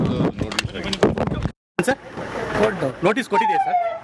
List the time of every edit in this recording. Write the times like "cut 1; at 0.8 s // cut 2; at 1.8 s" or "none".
cut 1; at 1.0 s